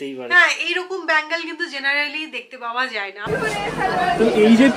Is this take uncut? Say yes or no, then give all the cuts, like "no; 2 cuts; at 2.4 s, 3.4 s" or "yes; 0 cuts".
no; 1 cut; at 3.2 s